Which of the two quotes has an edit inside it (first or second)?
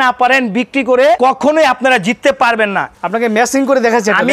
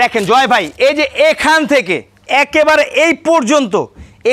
first